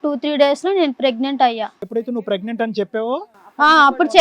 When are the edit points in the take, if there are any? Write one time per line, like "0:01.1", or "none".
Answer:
0:01.8

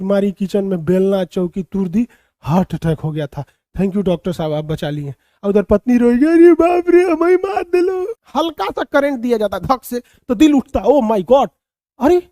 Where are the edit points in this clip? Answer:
0:08.2

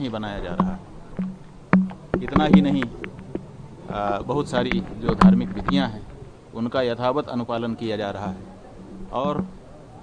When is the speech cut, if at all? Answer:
none

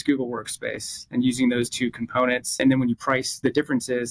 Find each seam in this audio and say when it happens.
none

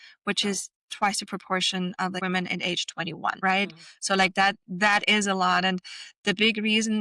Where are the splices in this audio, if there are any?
0:02.2
0:03.4

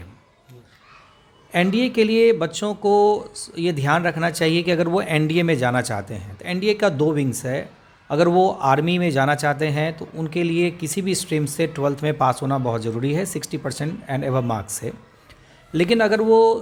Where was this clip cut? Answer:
none

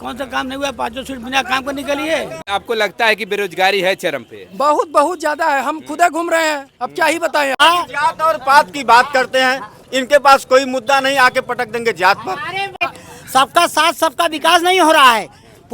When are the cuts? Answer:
0:02.4
0:07.6
0:12.8

